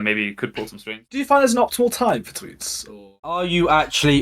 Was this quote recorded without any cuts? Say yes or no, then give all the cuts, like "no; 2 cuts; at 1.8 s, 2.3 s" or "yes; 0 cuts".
no; 2 cuts; at 1.0 s, 3.2 s